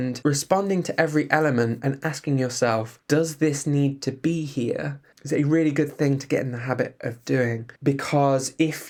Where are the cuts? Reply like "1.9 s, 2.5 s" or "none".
none